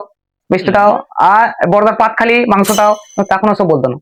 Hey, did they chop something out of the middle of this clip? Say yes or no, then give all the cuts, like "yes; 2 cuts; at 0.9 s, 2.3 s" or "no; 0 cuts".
no; 0 cuts